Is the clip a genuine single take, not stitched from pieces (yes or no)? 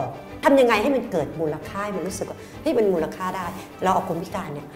yes